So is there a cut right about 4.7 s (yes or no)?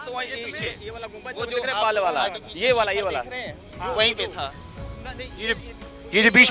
no